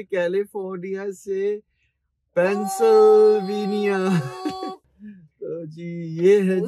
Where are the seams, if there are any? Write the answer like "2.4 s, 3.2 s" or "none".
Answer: 4.8 s